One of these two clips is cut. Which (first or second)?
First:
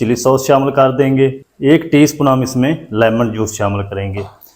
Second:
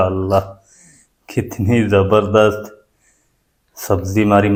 first